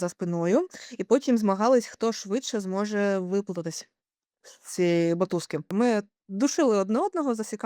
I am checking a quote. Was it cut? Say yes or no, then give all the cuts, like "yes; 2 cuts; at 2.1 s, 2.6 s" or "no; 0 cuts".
yes; 1 cut; at 5.7 s